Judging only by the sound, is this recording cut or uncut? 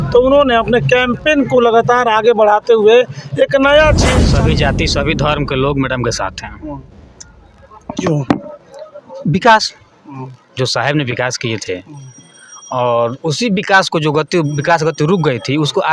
cut